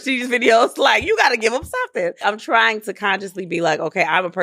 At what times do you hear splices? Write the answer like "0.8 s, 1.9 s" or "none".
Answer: 2.2 s

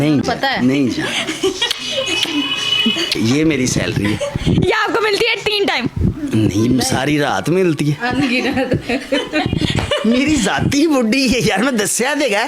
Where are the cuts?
none

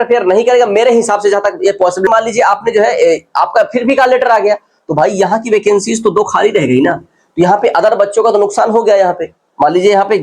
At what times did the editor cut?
2.1 s

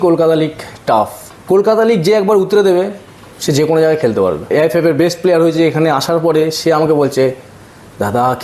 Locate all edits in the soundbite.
1.3 s, 4.5 s

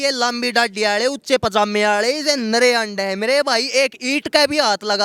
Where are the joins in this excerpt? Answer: none

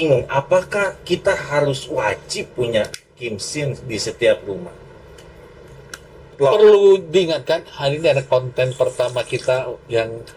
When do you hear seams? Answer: 6.3 s

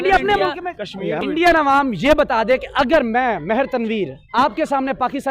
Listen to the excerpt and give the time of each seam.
1.2 s

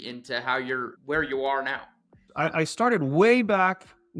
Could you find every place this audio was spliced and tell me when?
0.9 s, 2.3 s

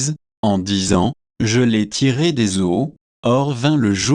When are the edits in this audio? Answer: 3.0 s

